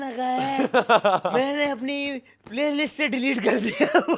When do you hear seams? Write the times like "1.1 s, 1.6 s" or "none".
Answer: none